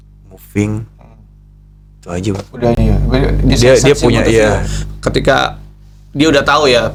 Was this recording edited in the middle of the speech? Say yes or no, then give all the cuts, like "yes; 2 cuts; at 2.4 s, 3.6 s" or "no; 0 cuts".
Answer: no; 0 cuts